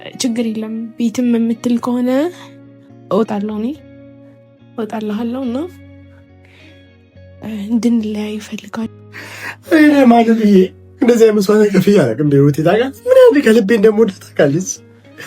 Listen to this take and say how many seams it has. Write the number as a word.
one